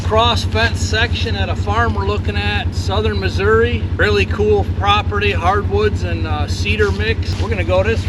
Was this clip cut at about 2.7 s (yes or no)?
yes